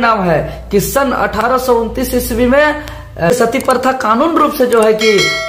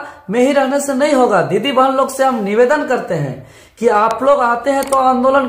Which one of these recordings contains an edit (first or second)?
first